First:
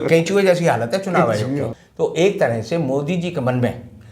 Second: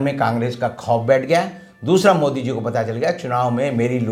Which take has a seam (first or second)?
first